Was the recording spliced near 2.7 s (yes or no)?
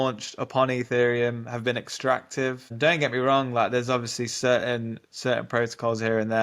yes